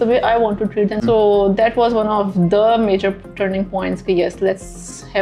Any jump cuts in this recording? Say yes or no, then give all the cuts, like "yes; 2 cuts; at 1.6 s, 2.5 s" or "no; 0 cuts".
yes; 1 cut; at 1.0 s